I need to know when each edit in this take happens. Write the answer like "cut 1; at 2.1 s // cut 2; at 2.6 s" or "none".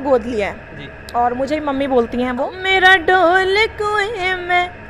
cut 1; at 2.5 s